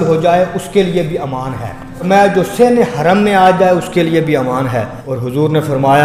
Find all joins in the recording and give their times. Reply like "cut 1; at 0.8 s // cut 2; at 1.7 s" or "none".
cut 1; at 2.1 s // cut 2; at 5.0 s